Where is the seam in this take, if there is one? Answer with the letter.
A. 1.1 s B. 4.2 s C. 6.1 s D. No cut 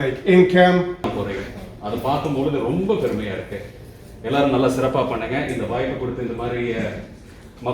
A